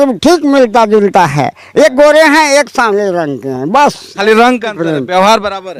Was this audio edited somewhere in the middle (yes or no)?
no